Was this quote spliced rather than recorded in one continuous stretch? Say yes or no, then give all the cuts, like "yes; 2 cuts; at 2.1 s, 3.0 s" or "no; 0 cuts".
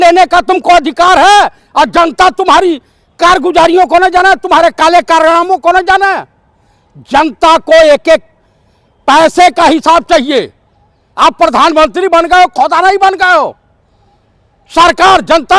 no; 0 cuts